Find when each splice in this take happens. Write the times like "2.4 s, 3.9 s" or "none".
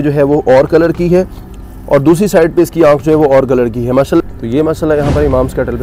4.2 s